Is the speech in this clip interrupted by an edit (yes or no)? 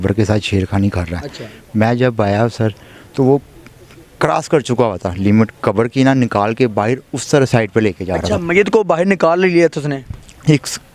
no